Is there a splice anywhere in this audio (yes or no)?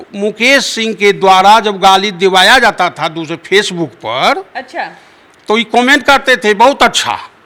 no